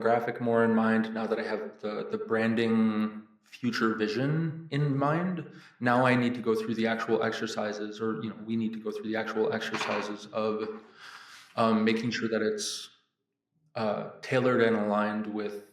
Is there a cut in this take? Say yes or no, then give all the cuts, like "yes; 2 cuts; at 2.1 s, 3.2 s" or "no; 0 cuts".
no; 0 cuts